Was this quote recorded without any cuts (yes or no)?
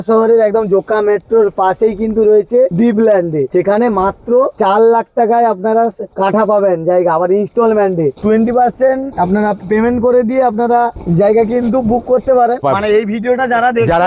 no